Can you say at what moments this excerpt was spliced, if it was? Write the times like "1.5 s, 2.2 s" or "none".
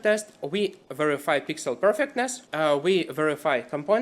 2.4 s